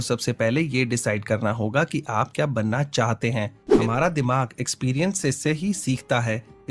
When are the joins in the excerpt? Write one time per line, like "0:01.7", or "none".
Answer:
0:03.6